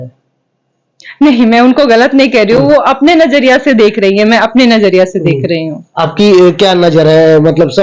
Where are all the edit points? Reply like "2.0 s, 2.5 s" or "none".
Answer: none